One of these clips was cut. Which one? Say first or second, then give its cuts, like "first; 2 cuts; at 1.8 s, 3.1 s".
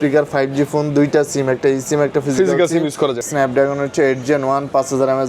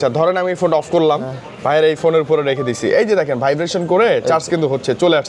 first; 1 cut; at 3.3 s